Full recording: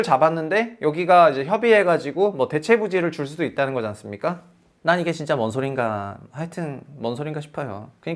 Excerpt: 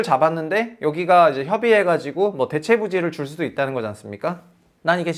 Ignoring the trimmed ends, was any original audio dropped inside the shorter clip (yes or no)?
no